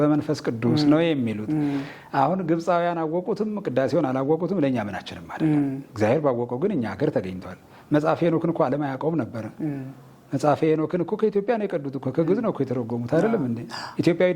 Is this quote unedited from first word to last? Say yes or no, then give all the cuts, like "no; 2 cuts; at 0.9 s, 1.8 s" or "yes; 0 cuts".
yes; 0 cuts